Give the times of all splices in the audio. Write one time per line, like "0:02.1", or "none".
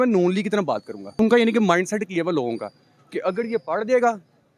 0:01.2